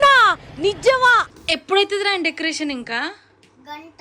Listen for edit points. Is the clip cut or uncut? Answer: cut